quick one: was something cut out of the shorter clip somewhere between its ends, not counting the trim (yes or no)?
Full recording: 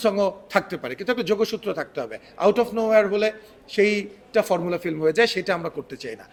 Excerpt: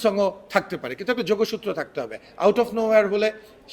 no